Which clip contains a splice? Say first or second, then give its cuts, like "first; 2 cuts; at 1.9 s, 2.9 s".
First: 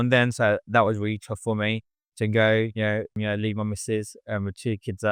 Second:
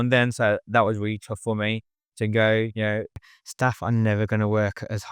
second; 1 cut; at 3.2 s